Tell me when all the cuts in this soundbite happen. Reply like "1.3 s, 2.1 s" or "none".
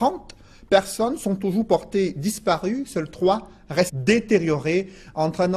none